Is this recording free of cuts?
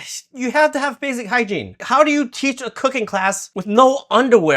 no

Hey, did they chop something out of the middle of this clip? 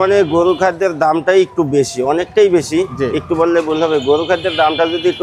no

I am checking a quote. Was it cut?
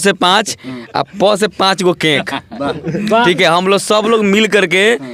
no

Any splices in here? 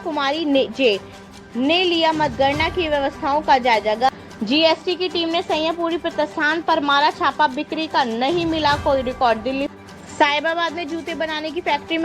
yes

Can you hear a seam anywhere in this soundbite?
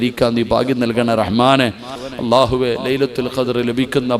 yes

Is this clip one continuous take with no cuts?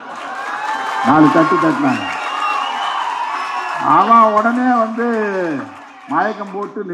yes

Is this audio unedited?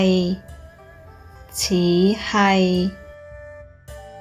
no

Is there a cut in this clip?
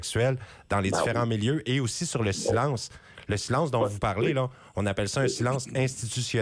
no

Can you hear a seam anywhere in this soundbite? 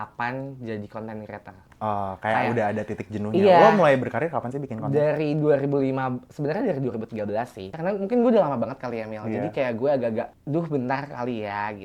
yes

